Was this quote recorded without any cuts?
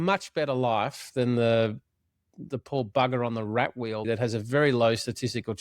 no; 1 cut; at 4.0 s

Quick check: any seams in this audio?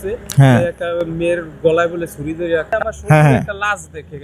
yes; 1 cut; at 2.7 s

